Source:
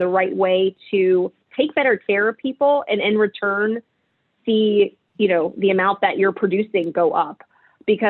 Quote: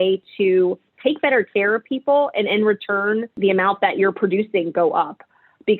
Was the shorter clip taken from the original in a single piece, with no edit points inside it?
no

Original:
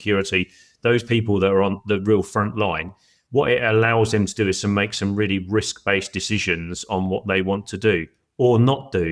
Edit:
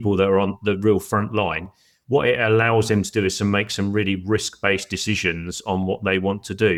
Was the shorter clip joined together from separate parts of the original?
no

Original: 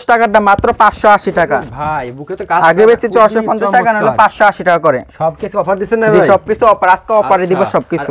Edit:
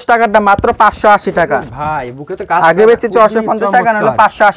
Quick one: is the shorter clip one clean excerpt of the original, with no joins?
yes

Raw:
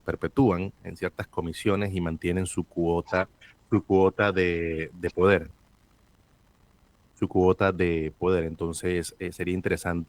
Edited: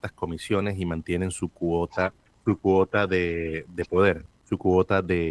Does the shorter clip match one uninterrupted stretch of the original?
no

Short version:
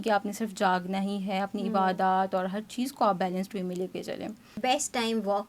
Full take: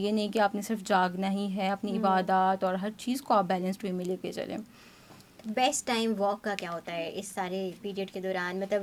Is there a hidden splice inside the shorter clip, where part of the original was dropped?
yes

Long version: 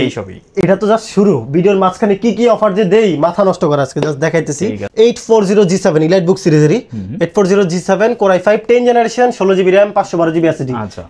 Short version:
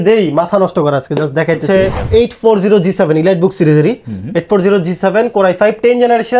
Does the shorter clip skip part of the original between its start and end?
no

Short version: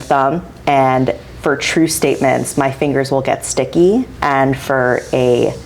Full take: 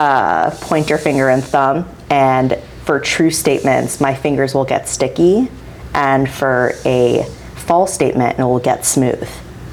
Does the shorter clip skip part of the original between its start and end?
yes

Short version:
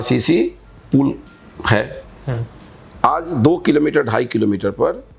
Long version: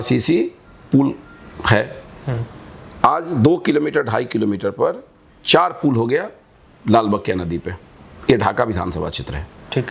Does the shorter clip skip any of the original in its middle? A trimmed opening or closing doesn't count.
no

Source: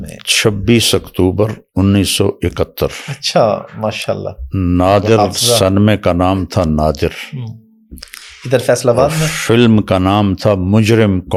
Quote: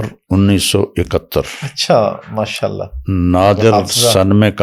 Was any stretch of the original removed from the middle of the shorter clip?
no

